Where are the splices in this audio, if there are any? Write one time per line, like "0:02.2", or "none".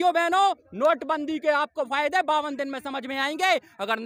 none